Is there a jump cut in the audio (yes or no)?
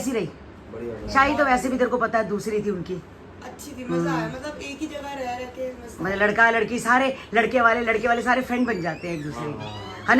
no